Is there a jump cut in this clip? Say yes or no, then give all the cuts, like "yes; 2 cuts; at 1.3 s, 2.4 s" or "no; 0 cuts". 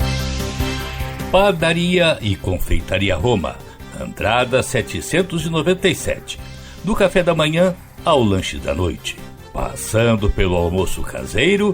yes; 1 cut; at 1.2 s